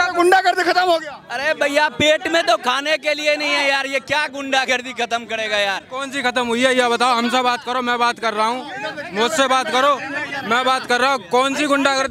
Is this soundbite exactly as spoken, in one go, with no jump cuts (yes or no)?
yes